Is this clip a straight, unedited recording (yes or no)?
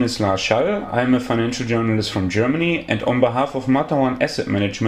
yes